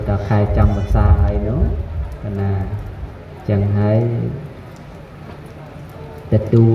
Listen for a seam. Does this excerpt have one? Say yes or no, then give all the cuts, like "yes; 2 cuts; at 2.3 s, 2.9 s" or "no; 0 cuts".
no; 0 cuts